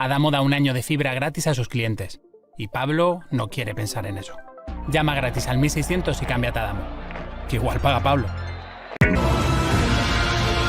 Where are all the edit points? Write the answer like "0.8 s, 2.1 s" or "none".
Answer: 9.0 s